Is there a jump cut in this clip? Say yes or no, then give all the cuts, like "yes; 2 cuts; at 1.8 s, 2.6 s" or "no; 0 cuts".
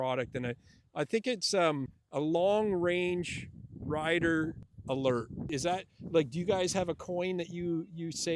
yes; 3 cuts; at 2.0 s, 4.7 s, 5.5 s